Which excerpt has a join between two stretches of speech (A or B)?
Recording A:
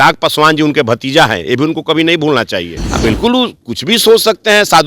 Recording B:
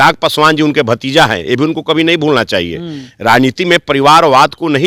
A